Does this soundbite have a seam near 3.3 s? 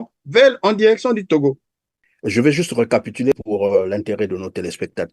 yes; 1 cut; at 3.3 s

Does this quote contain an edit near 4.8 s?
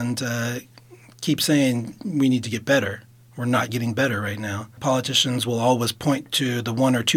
yes; 2 cuts; at 1.9 s, 4.8 s

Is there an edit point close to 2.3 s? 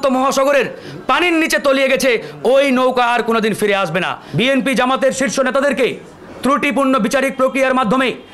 no; 1 cut; at 4.2 s

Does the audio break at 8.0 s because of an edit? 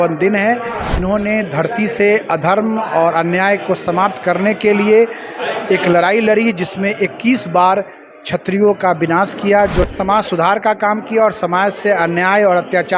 no; 2 cuts; at 1.0 s, 9.9 s

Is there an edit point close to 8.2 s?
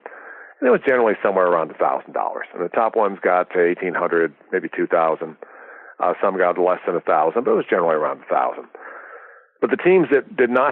no; 0 cuts

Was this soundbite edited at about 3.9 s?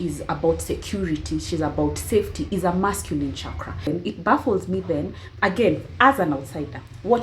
yes; 1 cut; at 3.9 s

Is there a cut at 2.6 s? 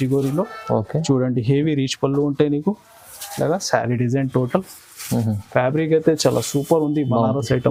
no; 0 cuts

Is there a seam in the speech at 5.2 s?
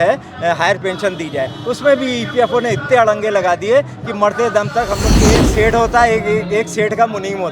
yes; 1 cut; at 5.2 s

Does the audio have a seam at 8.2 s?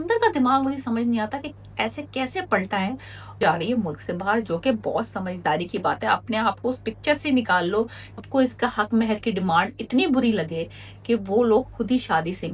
yes; 2 cuts; at 3.4 s, 8.2 s

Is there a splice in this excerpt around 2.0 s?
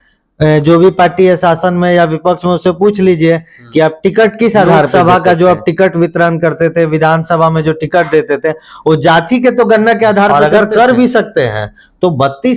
no; 2 cuts; at 4.9 s, 10.3 s

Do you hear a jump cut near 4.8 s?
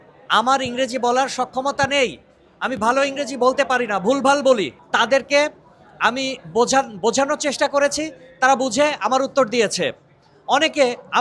yes; 1 cut; at 4.8 s

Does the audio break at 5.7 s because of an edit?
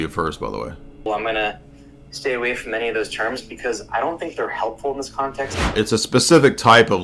yes; 2 cuts; at 1.0 s, 5.7 s

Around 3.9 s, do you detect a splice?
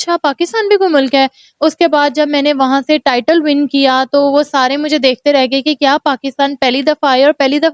no; 0 cuts

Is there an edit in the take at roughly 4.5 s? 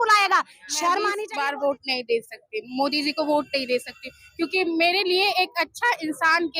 no; 1 cut; at 1.2 s

